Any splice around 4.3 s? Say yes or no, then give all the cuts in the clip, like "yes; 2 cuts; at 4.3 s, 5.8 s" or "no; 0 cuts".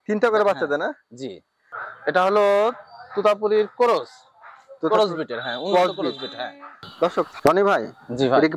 no; 2 cuts; at 1.8 s, 7.3 s